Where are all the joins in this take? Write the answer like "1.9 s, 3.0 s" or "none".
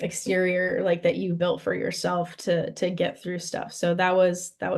none